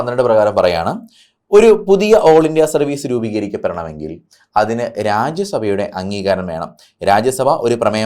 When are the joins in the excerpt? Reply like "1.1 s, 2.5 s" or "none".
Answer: none

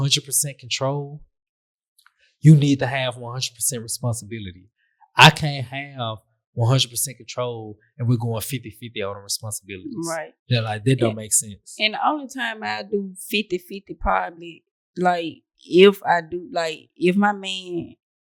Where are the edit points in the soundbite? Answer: none

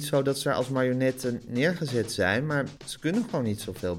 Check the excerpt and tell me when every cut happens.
2.8 s

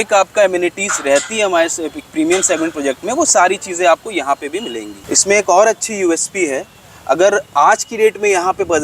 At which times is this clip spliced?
5.0 s

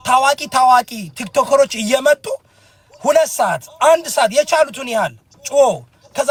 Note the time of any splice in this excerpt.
none

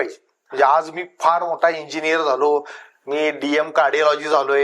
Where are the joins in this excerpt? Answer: none

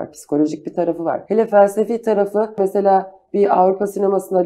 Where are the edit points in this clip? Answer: 1.2 s, 2.6 s

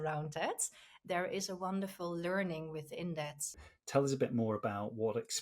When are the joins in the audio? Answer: 3.6 s

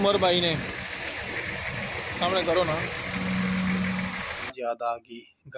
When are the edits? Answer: 4.5 s

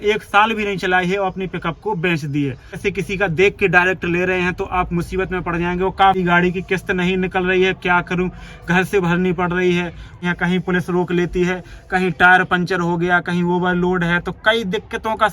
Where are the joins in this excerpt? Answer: 2.7 s, 6.2 s, 10.2 s

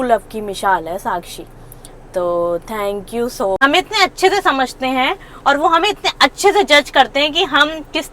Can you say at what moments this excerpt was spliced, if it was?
3.6 s

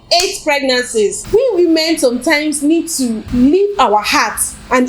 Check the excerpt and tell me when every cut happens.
1.2 s, 3.2 s

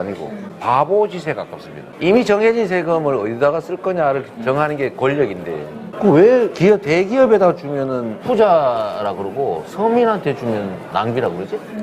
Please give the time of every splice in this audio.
1.6 s, 6.5 s, 8.1 s

